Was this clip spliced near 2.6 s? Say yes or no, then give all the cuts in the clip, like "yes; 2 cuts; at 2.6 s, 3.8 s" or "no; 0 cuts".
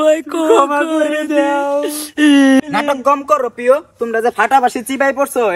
yes; 1 cut; at 2.6 s